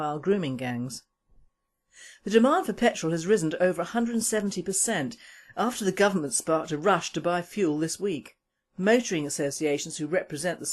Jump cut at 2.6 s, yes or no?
yes